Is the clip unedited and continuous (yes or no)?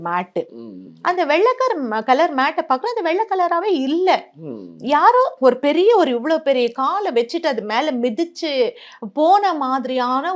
yes